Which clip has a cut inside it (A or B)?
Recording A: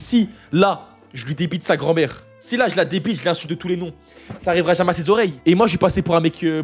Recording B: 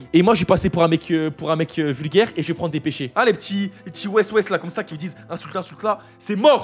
B